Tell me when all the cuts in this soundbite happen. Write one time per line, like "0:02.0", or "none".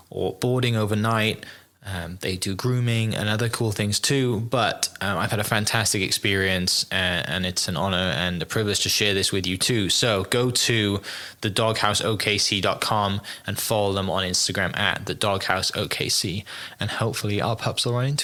none